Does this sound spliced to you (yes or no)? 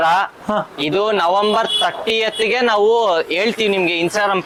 no